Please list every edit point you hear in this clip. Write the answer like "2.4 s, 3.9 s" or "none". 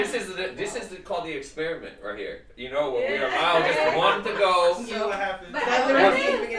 none